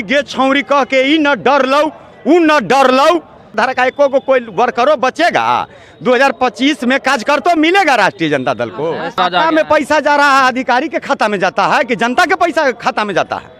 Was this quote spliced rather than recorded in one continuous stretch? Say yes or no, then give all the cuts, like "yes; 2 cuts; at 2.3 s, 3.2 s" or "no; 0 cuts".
yes; 2 cuts; at 3.5 s, 9.2 s